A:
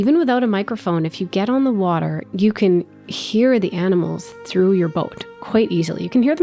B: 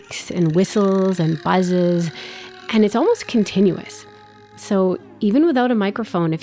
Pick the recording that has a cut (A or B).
A